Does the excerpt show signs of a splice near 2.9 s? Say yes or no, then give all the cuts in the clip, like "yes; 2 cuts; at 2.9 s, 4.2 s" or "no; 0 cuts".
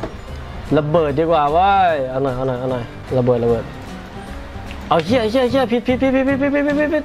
yes; 1 cut; at 2.9 s